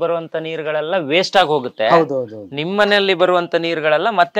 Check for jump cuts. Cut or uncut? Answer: uncut